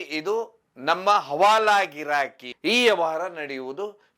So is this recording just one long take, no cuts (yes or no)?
no